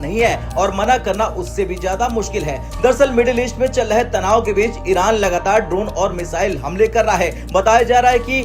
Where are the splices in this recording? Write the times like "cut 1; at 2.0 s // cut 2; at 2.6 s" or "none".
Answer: none